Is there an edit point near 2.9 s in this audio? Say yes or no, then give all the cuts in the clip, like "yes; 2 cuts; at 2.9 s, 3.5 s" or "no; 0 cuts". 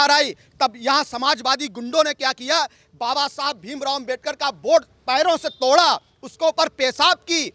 no; 0 cuts